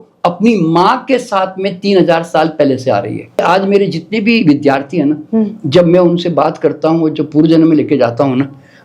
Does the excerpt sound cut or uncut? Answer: cut